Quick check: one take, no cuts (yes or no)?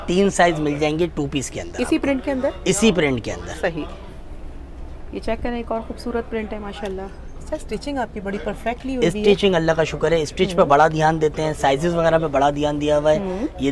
yes